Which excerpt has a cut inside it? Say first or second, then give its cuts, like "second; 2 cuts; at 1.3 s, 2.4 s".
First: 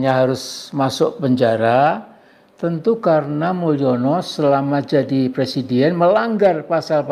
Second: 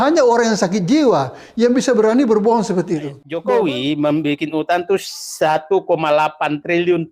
second; 1 cut; at 3.4 s